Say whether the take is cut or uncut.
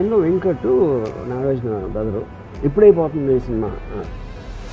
cut